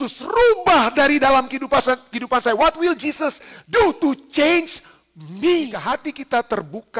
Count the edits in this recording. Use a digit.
1